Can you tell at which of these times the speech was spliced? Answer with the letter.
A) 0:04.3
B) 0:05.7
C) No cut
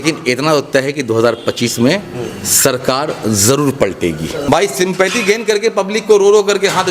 A